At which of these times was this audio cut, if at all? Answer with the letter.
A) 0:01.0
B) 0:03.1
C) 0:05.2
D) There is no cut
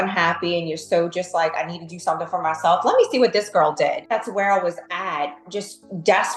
D